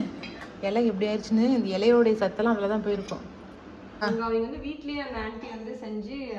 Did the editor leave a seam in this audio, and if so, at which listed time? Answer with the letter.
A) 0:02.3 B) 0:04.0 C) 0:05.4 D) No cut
B